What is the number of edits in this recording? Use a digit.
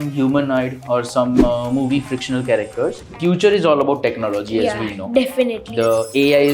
1